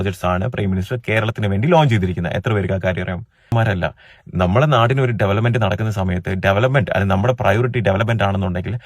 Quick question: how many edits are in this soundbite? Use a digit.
1